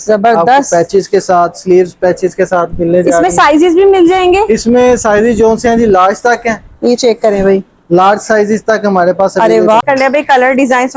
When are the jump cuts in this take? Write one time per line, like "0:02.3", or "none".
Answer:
0:09.8